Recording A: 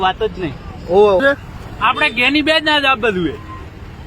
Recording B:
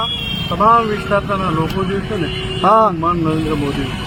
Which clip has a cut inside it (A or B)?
A